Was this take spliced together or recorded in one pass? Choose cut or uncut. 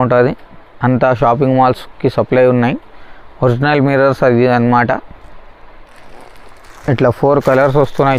uncut